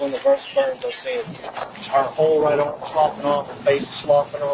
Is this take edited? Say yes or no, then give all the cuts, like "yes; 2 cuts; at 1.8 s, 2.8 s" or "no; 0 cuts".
yes; 1 cut; at 1.7 s